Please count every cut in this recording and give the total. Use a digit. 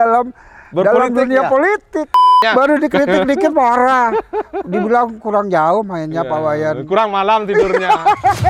1